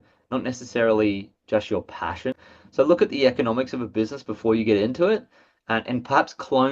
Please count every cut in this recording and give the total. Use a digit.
1